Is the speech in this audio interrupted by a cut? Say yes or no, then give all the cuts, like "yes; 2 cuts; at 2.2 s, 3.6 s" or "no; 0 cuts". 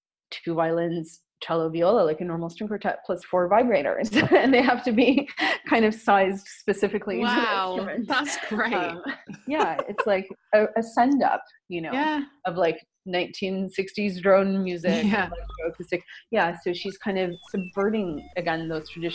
no; 0 cuts